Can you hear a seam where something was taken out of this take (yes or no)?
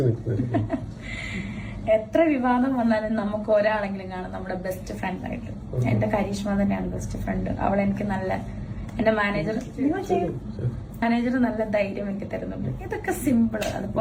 no